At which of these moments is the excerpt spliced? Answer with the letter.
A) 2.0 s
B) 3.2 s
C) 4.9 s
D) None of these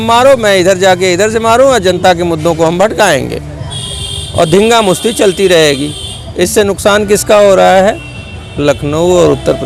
D